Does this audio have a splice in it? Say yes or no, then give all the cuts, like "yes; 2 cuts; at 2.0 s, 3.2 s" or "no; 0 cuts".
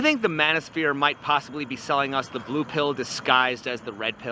no; 0 cuts